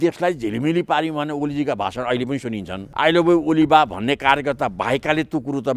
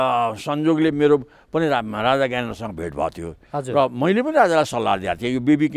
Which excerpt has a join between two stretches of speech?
first; 1 cut; at 2.8 s

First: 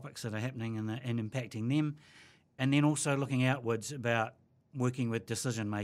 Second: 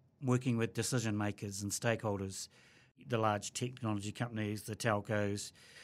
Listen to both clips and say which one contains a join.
second; 1 cut; at 3.0 s

